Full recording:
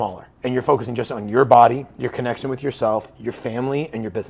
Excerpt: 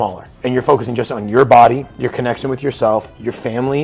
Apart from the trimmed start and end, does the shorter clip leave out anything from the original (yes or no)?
no